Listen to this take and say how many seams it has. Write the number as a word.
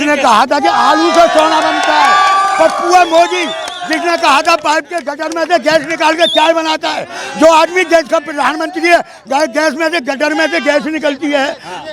zero